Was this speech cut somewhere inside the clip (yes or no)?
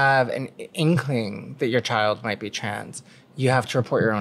no